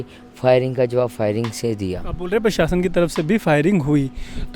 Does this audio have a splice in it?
yes; 1 cut; at 2.1 s

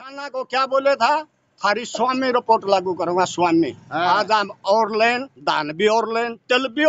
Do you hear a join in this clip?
no; 0 cuts

